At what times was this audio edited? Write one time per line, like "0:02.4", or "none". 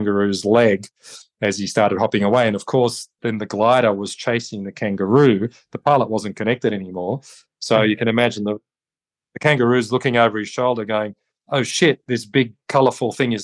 none